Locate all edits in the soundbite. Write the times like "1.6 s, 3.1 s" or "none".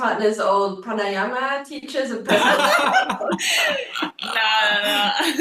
none